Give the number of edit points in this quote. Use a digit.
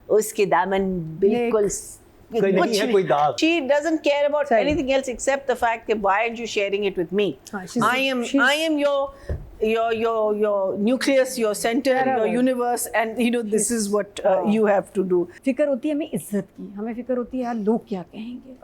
2